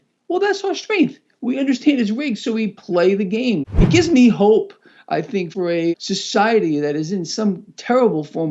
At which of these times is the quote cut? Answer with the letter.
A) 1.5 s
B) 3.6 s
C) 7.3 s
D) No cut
B